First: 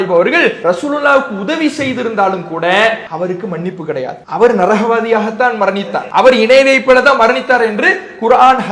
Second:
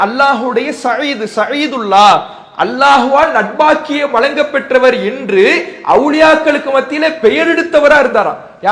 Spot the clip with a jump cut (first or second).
first